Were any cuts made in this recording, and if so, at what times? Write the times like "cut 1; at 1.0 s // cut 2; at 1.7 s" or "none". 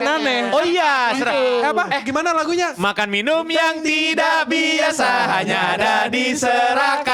none